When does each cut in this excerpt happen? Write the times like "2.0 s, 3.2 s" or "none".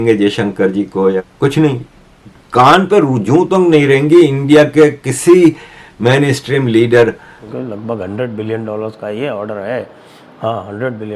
1.2 s, 7.3 s